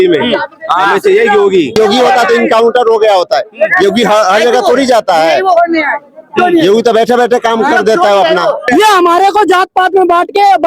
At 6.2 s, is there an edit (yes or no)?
no